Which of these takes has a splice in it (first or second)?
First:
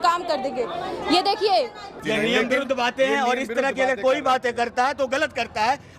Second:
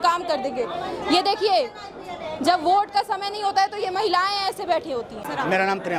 first